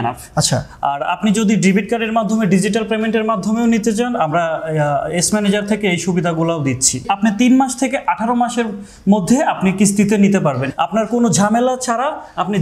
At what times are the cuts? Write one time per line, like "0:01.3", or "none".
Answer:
0:07.1
0:10.7